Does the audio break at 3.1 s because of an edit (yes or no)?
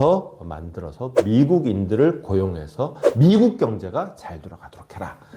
yes